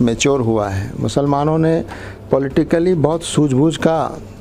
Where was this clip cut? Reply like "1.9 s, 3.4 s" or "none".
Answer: none